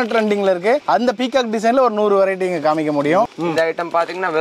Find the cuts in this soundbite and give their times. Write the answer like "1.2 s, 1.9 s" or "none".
3.3 s

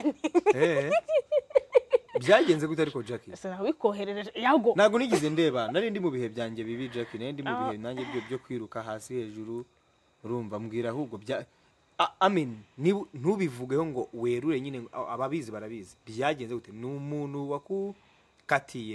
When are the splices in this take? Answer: none

